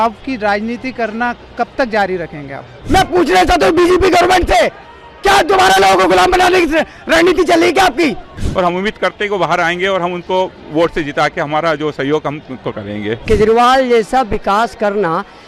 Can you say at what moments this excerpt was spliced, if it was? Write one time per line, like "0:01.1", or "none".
0:02.8
0:08.3
0:13.2